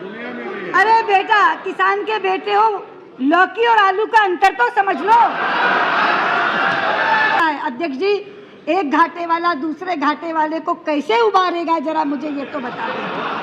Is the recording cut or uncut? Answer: cut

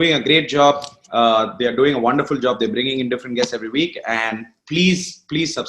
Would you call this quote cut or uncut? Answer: uncut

